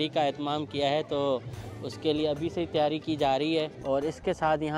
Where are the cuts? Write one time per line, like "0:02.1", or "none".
0:03.8